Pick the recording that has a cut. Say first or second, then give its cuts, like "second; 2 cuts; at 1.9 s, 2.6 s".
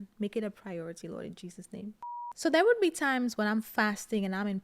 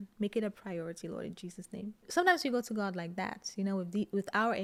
first; 1 cut; at 2.1 s